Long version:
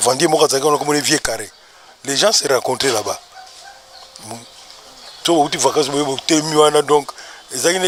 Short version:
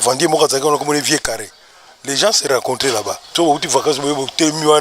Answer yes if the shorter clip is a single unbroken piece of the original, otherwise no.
no